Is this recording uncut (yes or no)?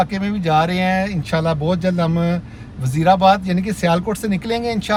yes